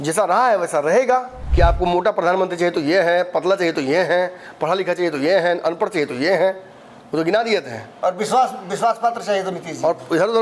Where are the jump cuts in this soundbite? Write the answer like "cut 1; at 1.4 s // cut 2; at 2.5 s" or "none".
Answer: cut 1; at 1.4 s